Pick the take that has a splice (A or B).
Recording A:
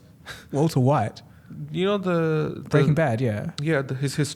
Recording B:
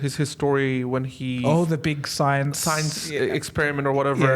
B